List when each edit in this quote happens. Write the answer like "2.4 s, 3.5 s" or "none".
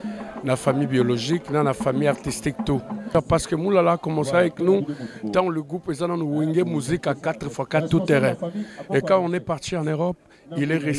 3.1 s

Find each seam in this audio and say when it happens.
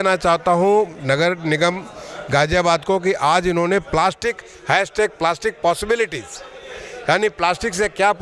none

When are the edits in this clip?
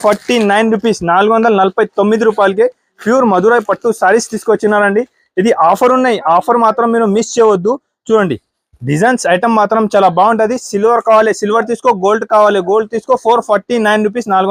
none

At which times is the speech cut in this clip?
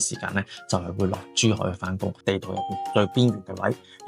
2.2 s

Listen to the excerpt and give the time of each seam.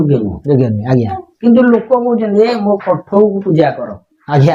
none

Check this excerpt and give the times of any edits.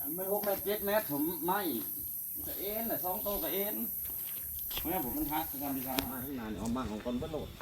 6.2 s

